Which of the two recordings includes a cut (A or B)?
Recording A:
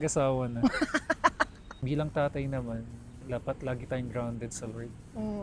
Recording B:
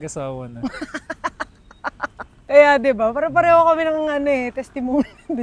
A